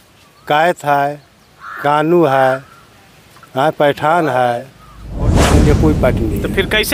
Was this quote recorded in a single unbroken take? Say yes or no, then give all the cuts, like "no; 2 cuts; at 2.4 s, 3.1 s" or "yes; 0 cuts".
no; 1 cut; at 5.4 s